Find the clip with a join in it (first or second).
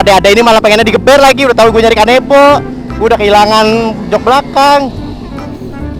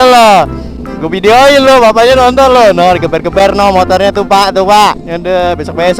second